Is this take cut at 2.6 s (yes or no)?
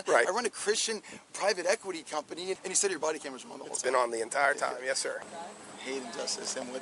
yes